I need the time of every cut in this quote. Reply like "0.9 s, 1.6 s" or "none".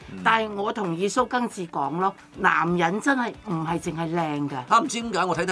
4.6 s